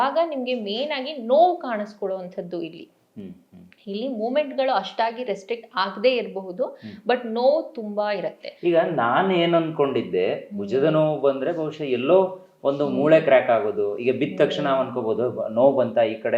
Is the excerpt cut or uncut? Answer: uncut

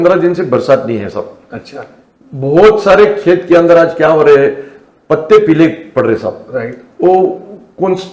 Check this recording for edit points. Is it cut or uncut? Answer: uncut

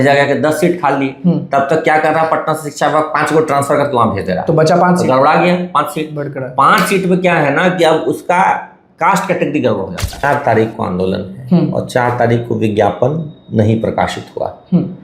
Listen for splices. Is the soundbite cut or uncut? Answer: cut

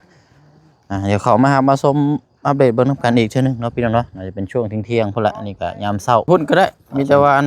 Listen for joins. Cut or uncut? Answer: cut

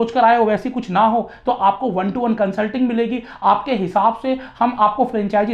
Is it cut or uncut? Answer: uncut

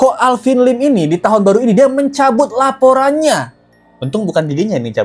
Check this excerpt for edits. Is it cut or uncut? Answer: uncut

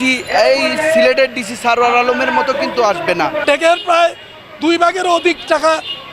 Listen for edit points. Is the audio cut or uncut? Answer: cut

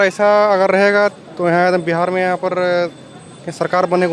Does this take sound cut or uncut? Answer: uncut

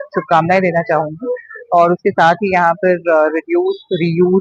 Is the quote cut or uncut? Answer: uncut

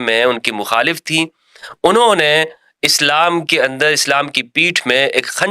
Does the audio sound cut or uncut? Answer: uncut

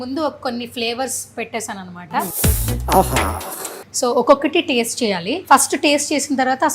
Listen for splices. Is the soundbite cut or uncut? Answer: cut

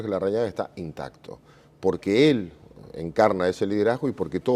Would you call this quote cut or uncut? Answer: cut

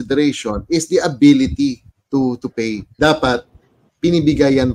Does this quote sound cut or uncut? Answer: cut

